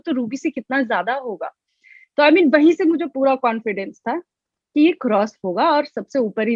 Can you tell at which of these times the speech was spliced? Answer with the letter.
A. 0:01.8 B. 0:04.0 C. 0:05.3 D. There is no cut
D